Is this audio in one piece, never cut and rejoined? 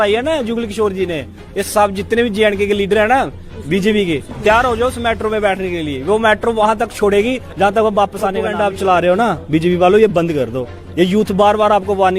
no; 1 cut; at 8.5 s

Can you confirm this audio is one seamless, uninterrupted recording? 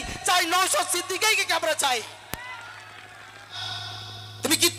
no; 1 cut; at 3.6 s

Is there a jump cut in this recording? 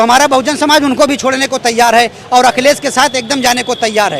no; 0 cuts

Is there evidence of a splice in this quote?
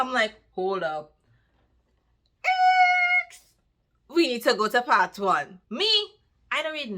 yes; 1 cut; at 5.5 s

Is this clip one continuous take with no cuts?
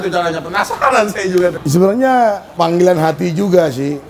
no; 2 cuts; at 1.6 s, 2.5 s

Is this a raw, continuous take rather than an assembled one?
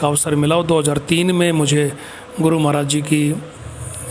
yes; 0 cuts

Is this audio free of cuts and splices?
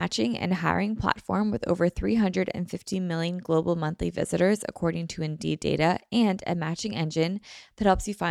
yes; 0 cuts

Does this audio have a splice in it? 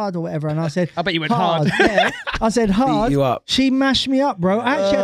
no; 0 cuts

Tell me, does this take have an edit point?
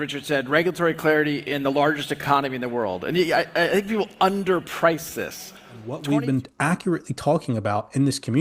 yes; 1 cut; at 5.9 s

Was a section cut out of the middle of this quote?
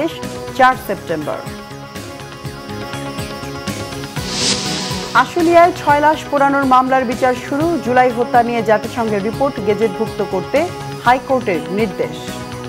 no; 0 cuts

